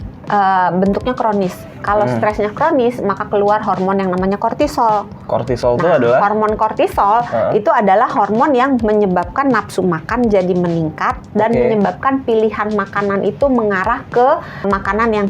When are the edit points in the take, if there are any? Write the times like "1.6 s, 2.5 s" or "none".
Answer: none